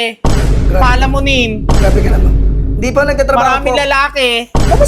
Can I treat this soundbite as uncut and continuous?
yes; 0 cuts

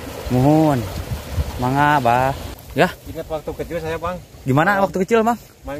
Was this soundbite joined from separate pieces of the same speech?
yes; 1 cut; at 2.5 s

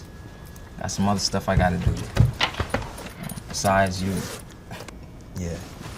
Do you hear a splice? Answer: no; 0 cuts

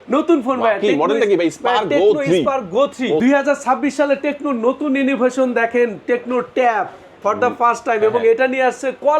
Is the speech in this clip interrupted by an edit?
yes; 1 cut; at 3.2 s

